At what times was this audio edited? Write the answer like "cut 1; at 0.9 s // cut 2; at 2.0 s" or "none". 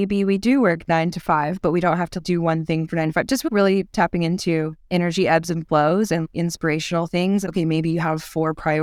cut 1; at 2.2 s // cut 2; at 3.5 s // cut 3; at 6.2 s // cut 4; at 7.5 s